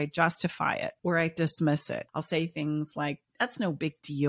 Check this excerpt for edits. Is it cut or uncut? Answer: cut